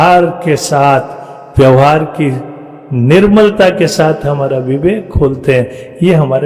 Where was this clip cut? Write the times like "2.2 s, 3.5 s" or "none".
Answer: none